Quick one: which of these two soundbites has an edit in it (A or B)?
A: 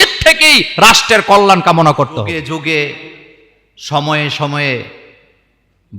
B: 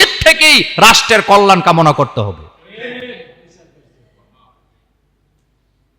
A